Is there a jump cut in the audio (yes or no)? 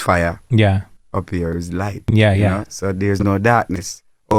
no